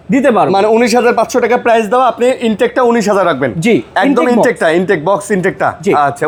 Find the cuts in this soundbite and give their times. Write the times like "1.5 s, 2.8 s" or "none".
none